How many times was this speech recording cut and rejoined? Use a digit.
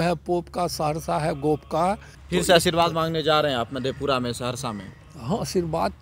1